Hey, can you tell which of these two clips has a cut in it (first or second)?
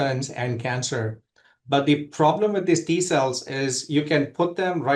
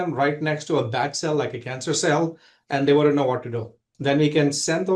second